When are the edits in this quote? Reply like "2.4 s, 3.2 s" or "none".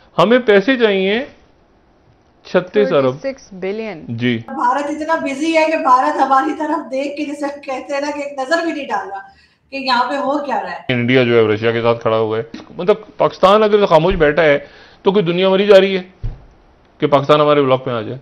4.5 s, 10.9 s, 12.6 s